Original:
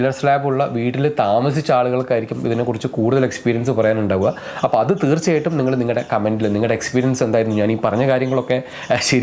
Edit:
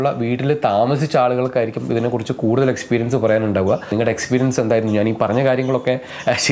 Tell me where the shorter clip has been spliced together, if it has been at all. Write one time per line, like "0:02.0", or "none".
0:03.9